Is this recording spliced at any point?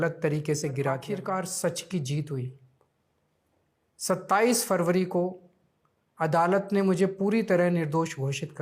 yes; 1 cut; at 1.0 s

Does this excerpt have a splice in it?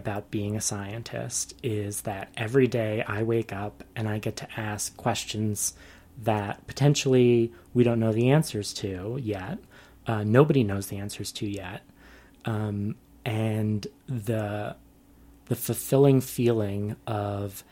no; 0 cuts

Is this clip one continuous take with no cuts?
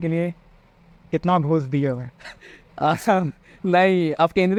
yes; 0 cuts

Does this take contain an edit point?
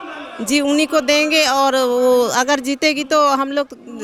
no; 0 cuts

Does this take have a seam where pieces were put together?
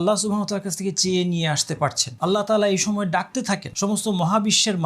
yes; 2 cuts; at 2.1 s, 3.7 s

